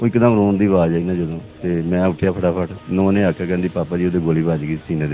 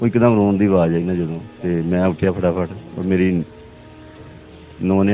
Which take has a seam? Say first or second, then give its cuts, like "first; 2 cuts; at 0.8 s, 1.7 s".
first; 1 cut; at 2.8 s